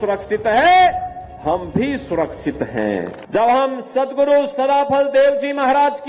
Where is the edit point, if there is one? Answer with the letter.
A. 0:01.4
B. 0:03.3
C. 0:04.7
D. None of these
B